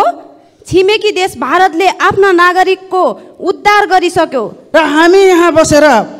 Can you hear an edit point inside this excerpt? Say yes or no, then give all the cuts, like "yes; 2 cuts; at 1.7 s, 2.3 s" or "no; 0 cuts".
yes; 1 cut; at 4.5 s